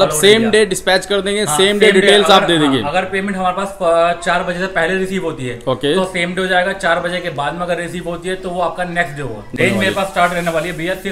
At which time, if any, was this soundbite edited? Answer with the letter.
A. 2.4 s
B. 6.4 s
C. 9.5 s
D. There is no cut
C